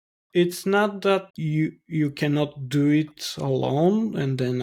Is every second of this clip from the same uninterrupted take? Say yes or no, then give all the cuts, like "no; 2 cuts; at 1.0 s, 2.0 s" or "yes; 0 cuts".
no; 1 cut; at 1.3 s